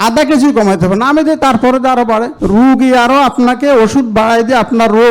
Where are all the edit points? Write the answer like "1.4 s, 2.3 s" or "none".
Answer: 2.3 s